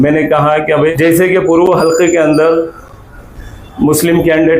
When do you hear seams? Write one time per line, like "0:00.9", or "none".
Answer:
0:00.9